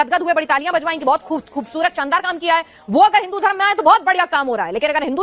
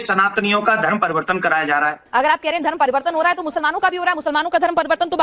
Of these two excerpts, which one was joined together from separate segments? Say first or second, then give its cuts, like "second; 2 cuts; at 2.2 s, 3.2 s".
second; 1 cut; at 2.0 s